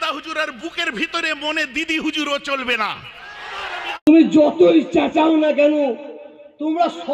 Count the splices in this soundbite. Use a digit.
1